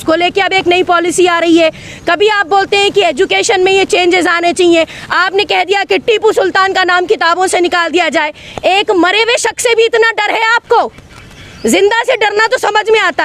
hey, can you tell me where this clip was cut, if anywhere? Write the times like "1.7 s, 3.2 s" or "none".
none